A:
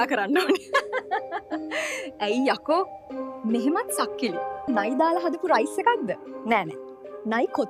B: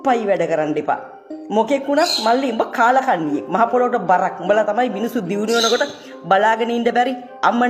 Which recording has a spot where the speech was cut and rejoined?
A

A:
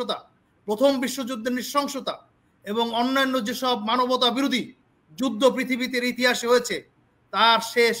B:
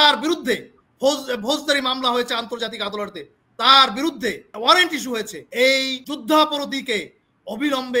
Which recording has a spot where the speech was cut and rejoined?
B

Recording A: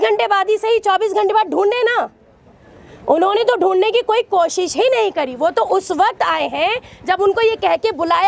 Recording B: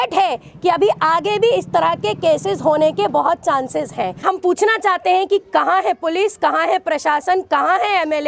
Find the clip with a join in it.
B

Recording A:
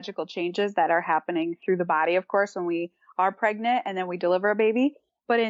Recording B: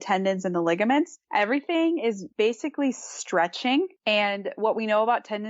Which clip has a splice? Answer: B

